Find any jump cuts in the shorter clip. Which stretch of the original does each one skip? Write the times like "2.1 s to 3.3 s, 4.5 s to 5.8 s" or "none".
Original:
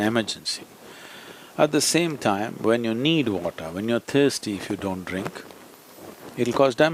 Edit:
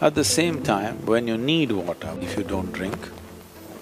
3.8 s to 4.5 s